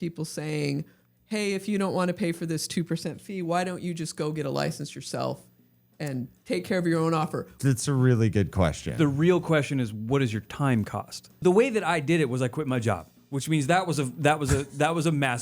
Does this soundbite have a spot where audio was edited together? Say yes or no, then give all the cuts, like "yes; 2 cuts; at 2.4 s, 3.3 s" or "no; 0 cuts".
yes; 2 cuts; at 7.5 s, 11.3 s